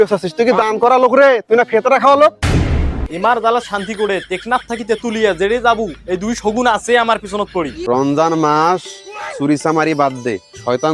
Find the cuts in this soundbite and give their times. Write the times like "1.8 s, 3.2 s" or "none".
3.1 s, 7.8 s